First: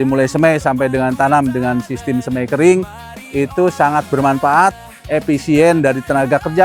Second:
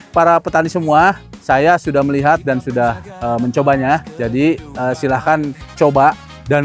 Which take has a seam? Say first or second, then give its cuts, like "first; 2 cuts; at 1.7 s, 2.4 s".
second; 2 cuts; at 1.3 s, 4.1 s